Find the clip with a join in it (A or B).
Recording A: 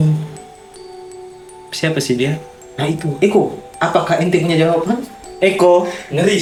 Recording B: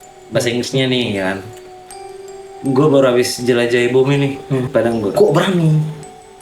B